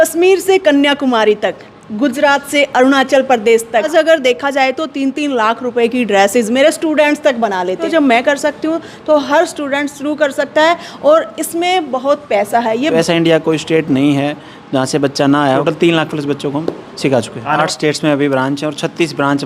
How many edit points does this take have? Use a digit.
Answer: 5